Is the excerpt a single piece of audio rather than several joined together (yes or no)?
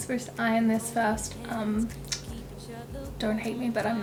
yes